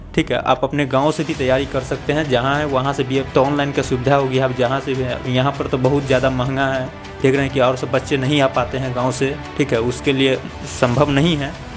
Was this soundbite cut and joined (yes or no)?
no